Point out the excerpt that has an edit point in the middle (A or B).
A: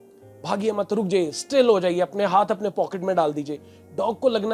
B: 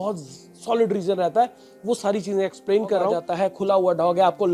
B